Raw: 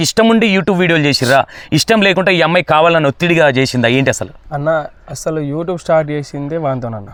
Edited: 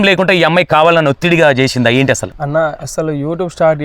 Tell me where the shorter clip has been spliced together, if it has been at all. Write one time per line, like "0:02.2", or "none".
0:02.5